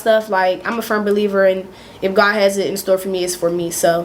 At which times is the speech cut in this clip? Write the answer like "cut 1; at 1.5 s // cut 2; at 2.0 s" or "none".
none